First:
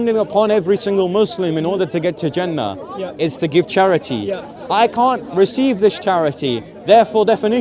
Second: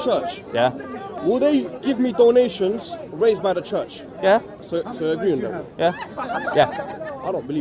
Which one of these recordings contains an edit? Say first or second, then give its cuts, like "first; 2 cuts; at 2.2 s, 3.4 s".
second; 2 cuts; at 1.1 s, 4.6 s